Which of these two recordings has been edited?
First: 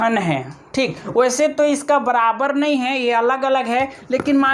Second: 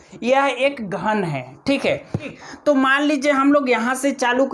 second; 1 cut; at 2.3 s

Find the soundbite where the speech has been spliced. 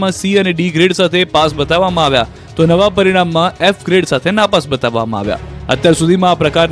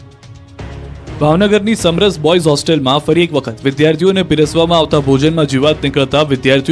second; 1 cut; at 4.5 s

